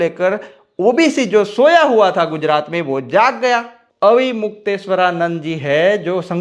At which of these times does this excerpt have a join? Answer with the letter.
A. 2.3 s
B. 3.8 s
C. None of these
B